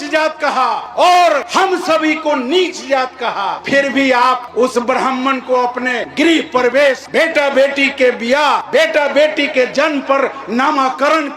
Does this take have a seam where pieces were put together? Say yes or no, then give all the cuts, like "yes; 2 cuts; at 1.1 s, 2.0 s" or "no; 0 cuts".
yes; 6 cuts; at 1.5 s, 3.6 s, 4.5 s, 6.0 s, 7.0 s, 8.6 s